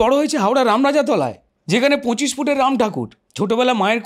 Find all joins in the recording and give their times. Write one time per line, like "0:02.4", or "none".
0:01.5
0:03.2